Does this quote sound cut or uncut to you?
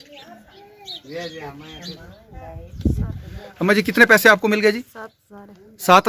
uncut